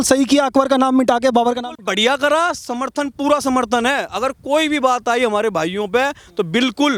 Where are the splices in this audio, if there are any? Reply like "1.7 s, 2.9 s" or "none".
none